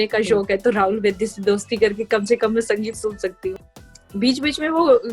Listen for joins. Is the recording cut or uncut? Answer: cut